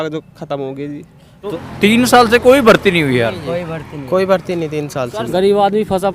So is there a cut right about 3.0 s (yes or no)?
no